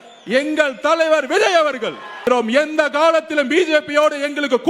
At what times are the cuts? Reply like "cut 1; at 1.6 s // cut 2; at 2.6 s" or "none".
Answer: cut 1; at 2.2 s